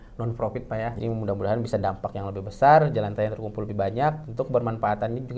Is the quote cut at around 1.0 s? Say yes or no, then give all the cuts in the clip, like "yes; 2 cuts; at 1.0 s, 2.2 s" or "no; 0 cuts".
yes; 1 cut; at 1.0 s